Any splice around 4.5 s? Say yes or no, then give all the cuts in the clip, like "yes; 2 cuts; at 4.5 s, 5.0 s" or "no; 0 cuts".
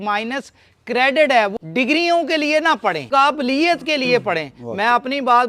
no; 2 cuts; at 1.6 s, 3.0 s